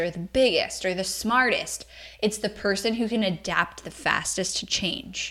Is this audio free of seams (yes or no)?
yes